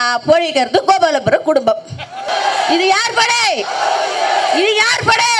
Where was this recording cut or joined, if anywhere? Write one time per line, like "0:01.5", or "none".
0:02.3